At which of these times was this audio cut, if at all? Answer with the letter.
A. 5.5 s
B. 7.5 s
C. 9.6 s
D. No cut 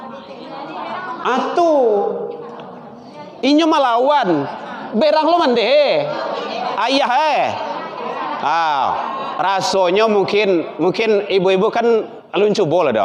D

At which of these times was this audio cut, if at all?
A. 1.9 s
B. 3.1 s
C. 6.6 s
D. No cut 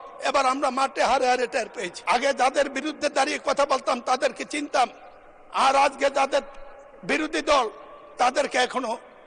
A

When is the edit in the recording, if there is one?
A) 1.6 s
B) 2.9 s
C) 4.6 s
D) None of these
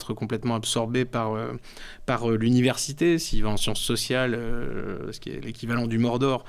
D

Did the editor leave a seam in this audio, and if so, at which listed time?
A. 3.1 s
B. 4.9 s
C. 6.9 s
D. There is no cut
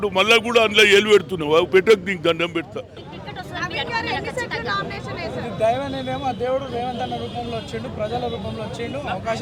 A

